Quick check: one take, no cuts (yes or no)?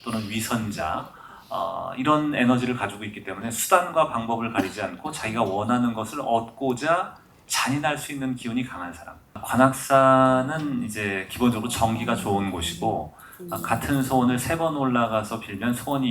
no